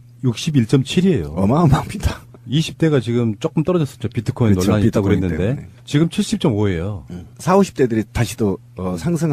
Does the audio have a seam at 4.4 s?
no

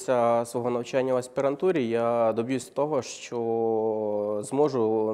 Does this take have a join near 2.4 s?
no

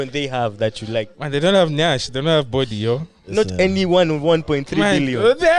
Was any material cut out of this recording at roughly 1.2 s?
yes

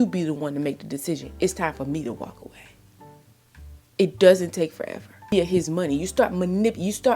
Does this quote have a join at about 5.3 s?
yes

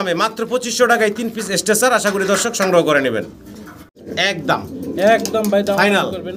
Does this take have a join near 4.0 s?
yes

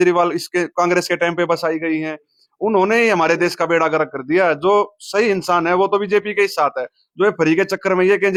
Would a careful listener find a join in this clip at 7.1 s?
no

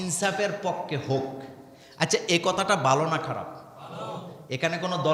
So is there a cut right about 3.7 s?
no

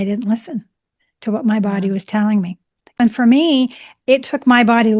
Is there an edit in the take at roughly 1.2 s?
no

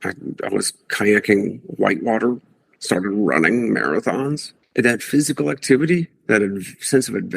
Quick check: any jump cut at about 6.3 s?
no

